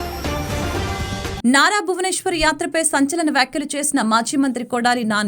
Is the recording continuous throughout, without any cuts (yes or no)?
no